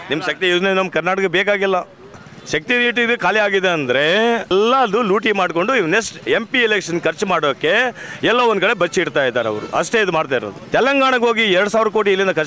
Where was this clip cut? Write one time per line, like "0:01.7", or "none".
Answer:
0:02.3
0:04.5
0:10.6